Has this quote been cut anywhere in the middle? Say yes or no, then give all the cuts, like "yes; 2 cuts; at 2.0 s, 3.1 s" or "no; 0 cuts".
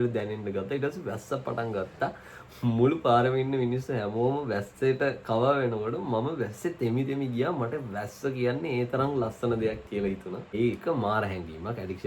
yes; 1 cut; at 10.5 s